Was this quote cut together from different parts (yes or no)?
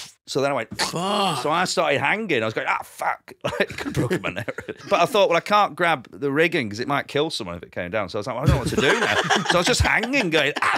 yes